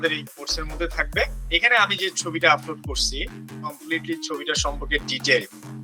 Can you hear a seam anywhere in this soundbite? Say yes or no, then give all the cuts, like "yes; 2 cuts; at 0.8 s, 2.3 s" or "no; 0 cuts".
yes; 1 cut; at 1.4 s